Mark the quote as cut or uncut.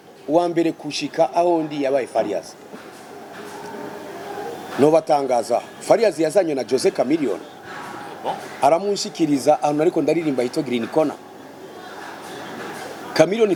uncut